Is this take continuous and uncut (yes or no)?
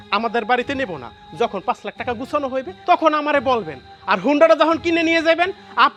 yes